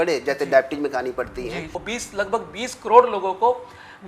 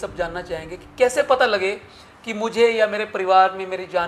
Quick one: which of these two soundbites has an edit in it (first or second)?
first